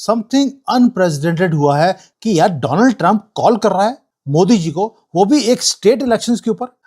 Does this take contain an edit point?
yes; 1 cut; at 2.1 s

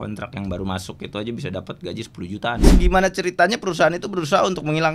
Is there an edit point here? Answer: yes; 1 cut; at 2.7 s

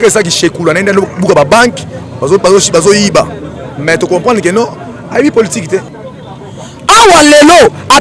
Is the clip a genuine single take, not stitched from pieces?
no; 1 cut; at 5.9 s

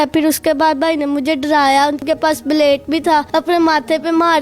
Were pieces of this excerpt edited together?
yes; 2 cuts; at 2.0 s, 3.3 s

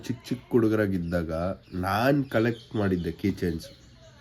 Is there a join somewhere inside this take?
no; 0 cuts

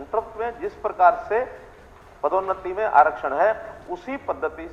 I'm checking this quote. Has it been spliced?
no; 0 cuts

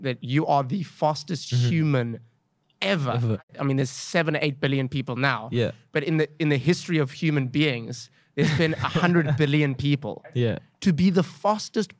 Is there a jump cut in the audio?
yes; 2 cuts; at 3.4 s, 10.3 s

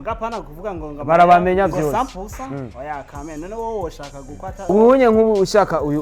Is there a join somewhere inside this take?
yes; 1 cut; at 4.5 s

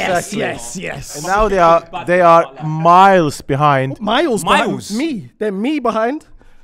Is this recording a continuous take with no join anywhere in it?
yes; 0 cuts

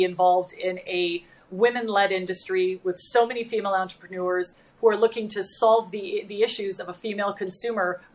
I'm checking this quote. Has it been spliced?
no; 0 cuts

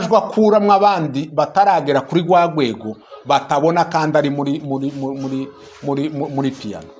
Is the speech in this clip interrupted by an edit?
no; 0 cuts

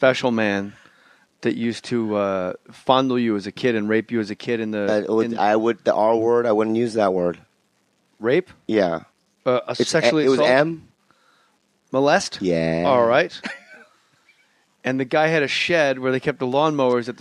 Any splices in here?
yes; 1 cut; at 15.5 s

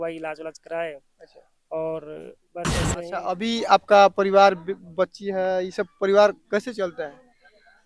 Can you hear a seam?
yes; 1 cut; at 2.9 s

